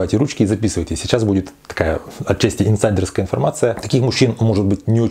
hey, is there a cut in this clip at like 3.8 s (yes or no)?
yes